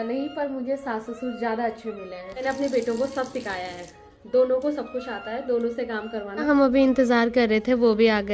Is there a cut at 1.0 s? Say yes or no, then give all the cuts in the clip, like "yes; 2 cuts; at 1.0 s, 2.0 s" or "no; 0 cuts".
no; 2 cuts; at 2.4 s, 6.4 s